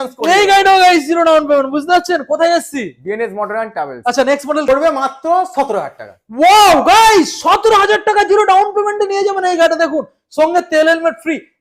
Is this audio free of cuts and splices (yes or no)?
no